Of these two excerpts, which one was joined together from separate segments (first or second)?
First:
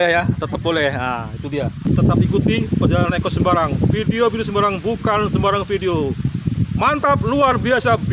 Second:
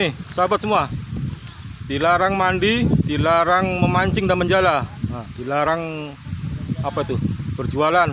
first